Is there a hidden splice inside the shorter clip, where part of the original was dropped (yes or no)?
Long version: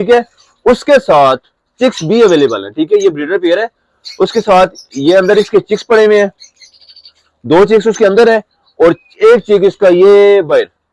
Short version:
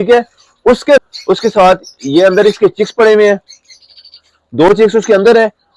yes